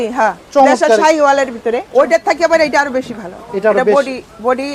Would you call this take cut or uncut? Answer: cut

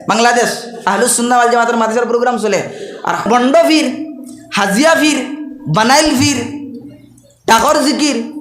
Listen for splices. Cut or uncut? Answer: cut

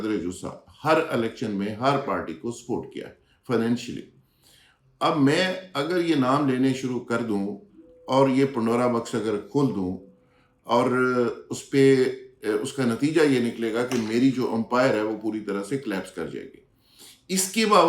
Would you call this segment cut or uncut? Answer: uncut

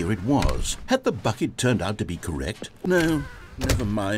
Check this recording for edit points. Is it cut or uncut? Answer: cut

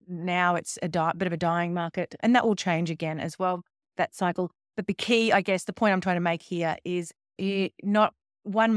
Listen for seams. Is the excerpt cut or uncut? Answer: uncut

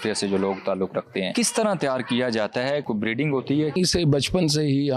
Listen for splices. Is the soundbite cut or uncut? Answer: cut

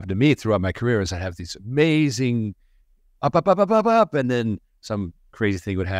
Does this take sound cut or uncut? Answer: uncut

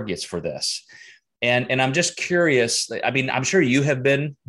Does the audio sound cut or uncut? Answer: uncut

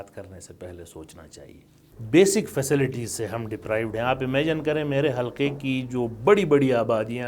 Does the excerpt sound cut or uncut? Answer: cut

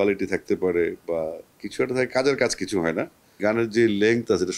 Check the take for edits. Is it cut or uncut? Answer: cut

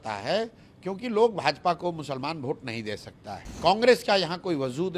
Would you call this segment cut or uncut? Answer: cut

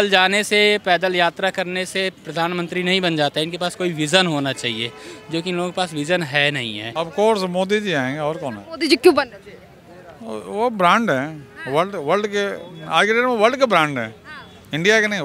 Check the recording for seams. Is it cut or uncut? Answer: cut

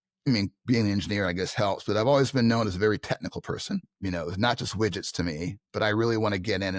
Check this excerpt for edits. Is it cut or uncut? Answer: cut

